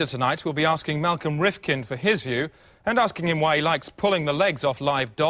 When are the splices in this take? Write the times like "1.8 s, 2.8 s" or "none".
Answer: 4.1 s